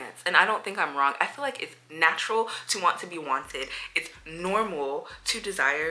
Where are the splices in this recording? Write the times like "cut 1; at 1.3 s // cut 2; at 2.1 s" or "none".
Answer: none